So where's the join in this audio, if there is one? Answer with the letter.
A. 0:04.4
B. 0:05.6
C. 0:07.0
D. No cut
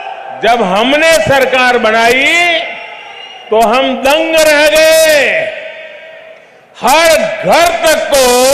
D